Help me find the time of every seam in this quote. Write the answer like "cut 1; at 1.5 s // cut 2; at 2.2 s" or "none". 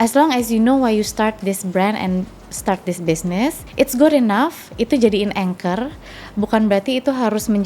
cut 1; at 3.6 s